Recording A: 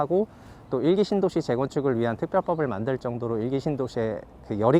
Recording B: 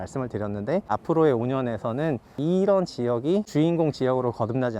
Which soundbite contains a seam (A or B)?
B